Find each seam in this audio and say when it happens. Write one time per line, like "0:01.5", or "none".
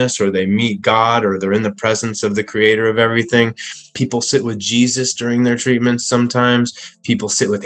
0:03.9